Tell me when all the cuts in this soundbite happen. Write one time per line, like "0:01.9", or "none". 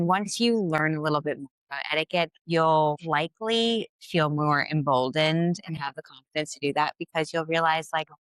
0:02.4
0:03.0